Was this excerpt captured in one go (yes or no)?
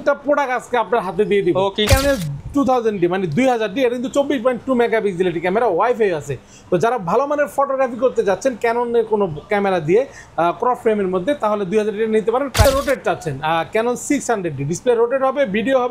no